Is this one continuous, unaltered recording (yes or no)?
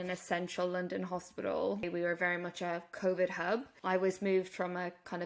no